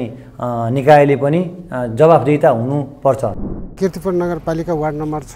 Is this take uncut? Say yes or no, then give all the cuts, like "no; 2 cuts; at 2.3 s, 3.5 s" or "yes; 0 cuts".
no; 1 cut; at 3.5 s